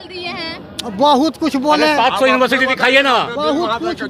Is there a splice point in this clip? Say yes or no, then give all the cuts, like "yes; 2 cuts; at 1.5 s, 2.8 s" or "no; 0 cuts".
no; 0 cuts